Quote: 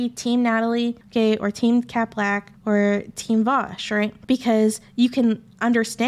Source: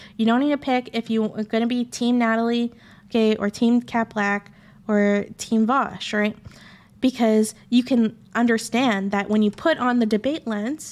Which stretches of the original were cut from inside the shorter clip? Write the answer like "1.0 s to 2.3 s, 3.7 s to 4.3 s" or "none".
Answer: 2.8 s to 3.0 s, 4.5 s to 4.7 s, 6.4 s to 6.9 s